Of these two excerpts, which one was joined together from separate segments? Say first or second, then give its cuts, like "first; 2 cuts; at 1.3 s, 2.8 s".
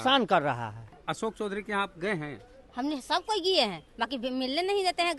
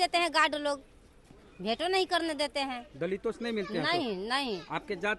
first; 1 cut; at 1.0 s